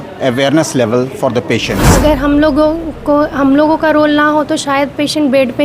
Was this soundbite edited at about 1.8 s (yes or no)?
yes